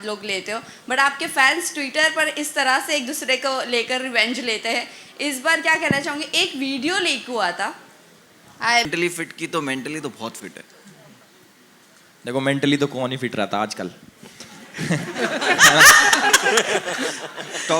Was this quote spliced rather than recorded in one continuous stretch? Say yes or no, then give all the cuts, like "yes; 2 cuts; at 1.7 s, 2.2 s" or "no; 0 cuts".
yes; 1 cut; at 8.9 s